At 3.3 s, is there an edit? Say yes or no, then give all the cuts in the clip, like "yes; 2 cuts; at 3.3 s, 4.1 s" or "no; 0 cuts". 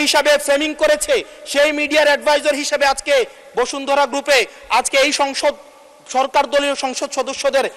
no; 0 cuts